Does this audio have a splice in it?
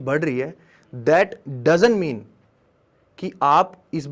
no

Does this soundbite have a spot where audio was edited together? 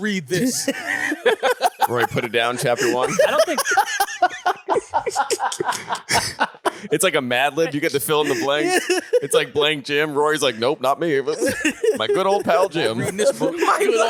no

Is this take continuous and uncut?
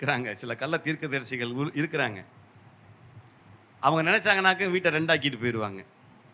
yes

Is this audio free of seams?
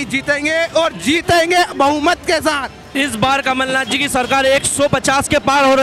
no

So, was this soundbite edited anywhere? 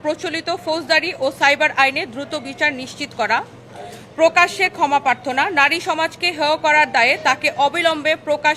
no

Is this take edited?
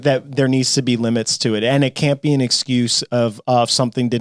no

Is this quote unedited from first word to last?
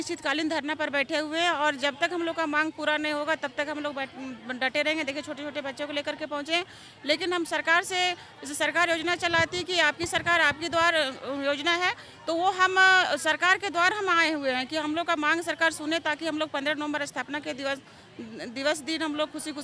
yes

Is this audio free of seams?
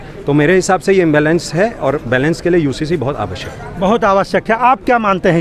yes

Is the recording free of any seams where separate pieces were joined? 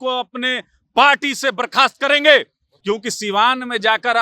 no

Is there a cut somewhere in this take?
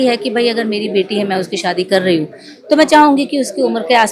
no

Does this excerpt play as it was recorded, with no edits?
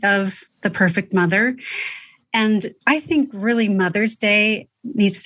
no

